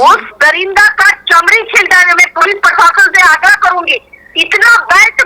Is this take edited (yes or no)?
no